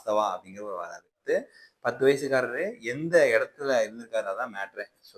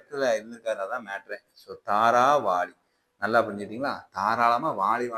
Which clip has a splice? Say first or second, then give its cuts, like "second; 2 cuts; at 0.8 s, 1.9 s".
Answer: first; 1 cut; at 1.2 s